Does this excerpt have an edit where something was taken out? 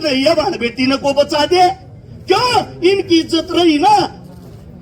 no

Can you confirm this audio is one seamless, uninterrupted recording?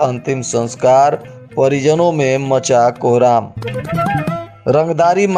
yes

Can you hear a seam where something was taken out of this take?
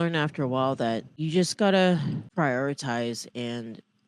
yes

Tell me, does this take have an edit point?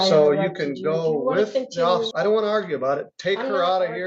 yes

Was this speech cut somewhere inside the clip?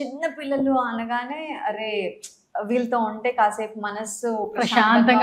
no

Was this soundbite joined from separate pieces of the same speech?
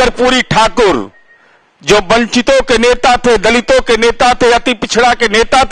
no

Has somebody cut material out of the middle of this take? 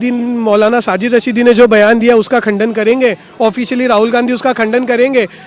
no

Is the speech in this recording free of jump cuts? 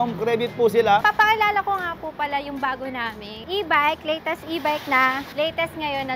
no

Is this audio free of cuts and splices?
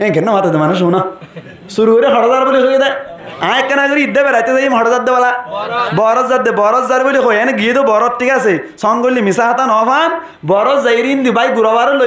yes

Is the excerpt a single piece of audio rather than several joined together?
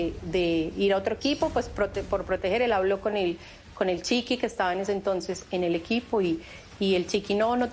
yes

